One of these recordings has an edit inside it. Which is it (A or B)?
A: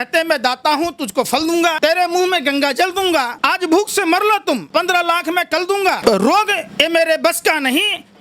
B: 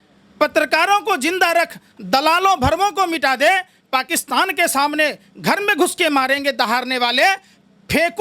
A